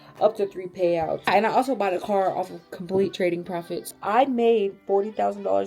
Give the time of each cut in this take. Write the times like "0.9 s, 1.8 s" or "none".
1.3 s, 3.9 s